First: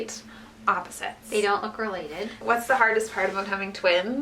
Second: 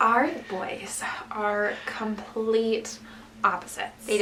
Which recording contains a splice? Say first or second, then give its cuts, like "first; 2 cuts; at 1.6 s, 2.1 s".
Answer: first; 1 cut; at 2.4 s